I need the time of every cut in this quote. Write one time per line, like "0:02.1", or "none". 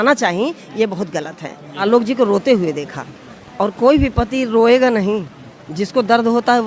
0:01.8